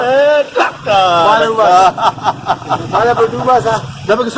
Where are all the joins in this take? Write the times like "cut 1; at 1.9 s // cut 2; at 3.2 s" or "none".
none